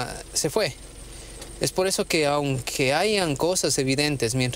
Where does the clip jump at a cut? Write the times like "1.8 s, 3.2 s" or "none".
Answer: none